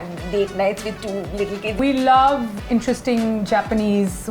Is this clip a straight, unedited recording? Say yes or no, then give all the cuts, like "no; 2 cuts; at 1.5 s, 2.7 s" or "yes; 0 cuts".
no; 2 cuts; at 1.8 s, 2.5 s